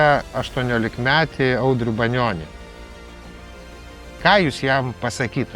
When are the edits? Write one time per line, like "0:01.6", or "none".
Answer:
none